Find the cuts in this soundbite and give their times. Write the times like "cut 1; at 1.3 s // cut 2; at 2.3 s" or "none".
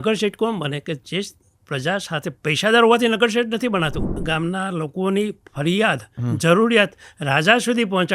cut 1; at 4.1 s